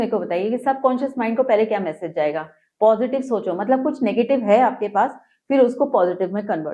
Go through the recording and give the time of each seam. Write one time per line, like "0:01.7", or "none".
none